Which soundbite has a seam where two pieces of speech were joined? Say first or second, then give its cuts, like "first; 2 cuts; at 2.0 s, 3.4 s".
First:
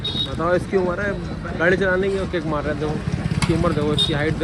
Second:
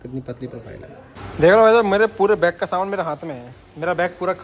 second; 1 cut; at 1.2 s